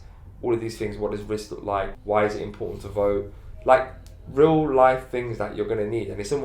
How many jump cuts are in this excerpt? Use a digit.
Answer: 1